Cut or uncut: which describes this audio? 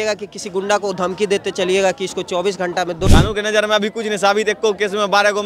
cut